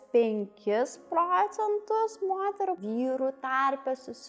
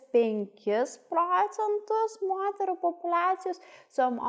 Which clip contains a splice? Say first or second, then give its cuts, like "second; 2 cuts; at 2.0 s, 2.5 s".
first; 1 cut; at 2.8 s